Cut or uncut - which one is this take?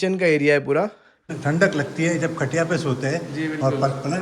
cut